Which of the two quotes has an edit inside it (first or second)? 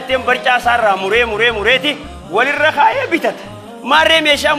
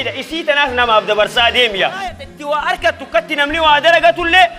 second